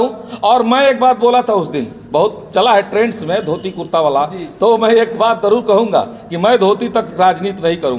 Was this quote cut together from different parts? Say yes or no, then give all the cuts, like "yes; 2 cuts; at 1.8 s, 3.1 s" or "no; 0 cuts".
no; 0 cuts